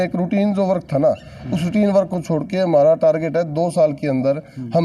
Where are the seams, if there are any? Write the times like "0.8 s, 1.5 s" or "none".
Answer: none

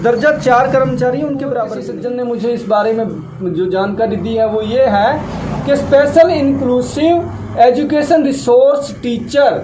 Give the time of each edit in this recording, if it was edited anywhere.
1.8 s

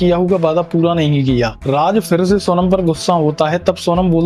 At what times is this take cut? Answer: 1.6 s

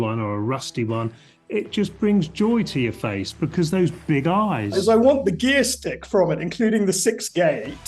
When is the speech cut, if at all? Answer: 4.7 s

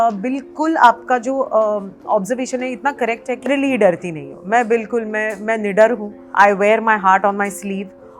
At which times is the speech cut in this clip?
3.5 s, 6.2 s

